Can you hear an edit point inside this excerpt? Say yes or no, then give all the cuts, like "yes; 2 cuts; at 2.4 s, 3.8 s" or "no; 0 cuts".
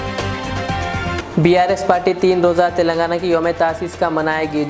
yes; 1 cut; at 1.2 s